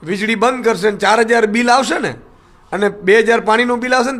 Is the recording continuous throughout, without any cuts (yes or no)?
yes